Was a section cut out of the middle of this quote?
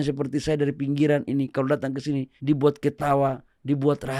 yes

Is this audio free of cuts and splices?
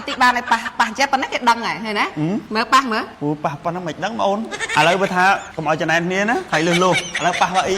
no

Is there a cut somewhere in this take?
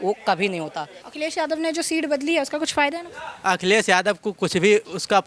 yes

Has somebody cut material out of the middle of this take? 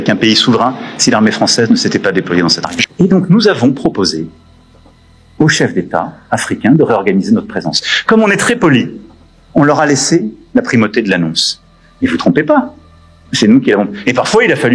yes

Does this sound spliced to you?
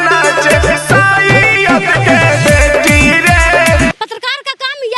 yes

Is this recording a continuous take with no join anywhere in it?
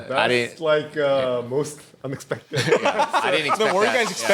yes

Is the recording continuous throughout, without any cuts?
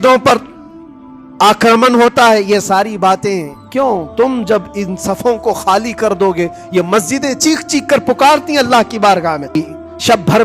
no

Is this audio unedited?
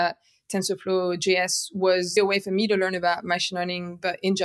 no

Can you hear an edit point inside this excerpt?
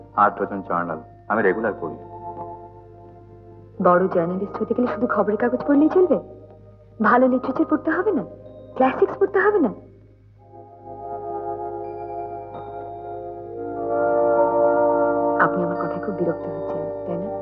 no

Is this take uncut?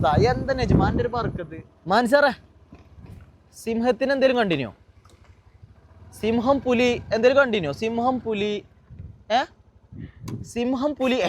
no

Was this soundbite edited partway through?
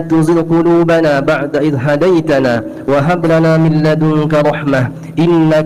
no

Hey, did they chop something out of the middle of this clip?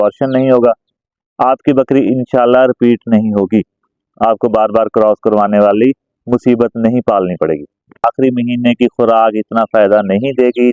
yes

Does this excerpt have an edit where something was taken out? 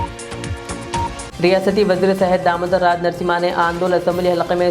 yes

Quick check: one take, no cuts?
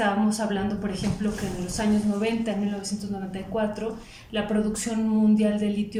yes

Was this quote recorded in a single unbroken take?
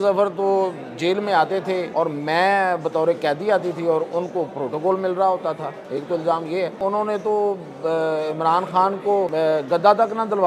no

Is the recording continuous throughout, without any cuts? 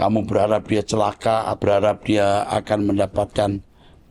no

